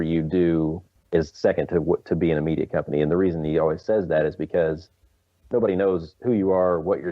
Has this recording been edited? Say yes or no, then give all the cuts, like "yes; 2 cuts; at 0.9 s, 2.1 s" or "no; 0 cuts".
yes; 2 cuts; at 0.9 s, 6.1 s